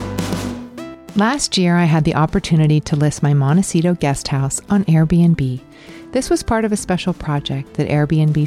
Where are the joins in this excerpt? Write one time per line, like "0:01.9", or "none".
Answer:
0:01.0